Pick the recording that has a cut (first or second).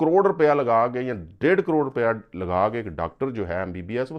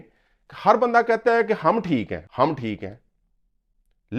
second